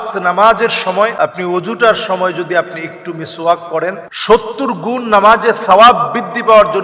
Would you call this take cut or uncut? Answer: cut